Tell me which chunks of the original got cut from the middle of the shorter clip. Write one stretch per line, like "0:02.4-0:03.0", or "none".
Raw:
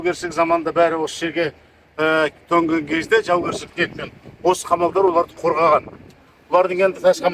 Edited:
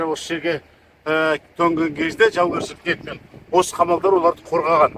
none